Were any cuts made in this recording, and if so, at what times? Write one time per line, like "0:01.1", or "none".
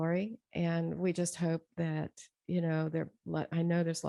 none